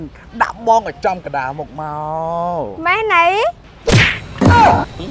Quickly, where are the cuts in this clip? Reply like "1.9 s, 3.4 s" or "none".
none